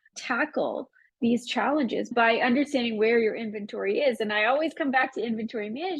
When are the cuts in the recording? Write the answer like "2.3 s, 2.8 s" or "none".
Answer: 2.1 s